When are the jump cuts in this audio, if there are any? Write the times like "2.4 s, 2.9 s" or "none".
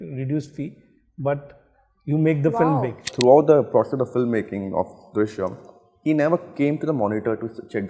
3.1 s